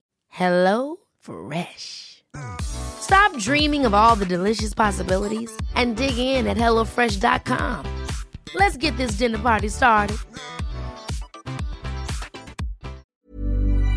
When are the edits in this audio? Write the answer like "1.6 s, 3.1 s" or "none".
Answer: 13.0 s

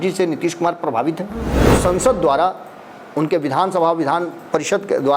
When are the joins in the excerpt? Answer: 1.6 s

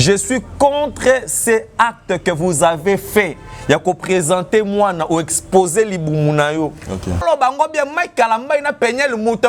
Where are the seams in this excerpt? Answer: 7.2 s

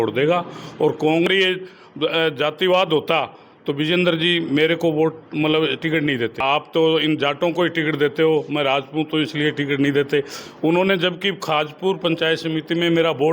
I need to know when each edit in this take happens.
1.3 s, 6.4 s

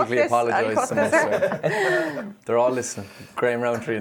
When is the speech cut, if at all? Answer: none

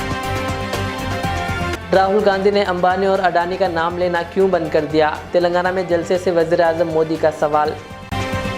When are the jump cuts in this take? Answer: none

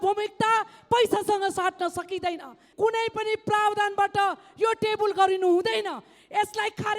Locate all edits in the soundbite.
2.6 s

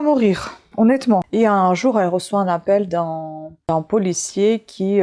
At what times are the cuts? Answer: 1.3 s

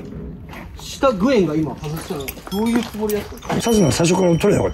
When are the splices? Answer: 3.6 s

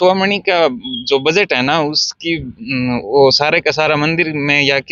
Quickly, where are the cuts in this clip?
none

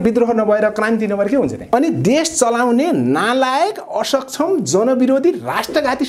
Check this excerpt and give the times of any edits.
1.6 s

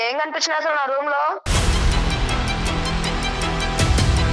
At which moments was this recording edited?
1.5 s

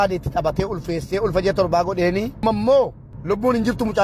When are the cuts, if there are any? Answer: 2.4 s, 3.1 s

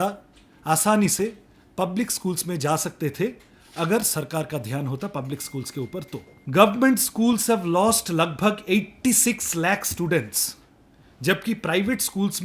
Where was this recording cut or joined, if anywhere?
6.3 s

